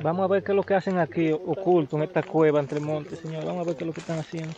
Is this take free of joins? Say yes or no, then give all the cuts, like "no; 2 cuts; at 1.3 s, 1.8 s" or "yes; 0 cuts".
yes; 0 cuts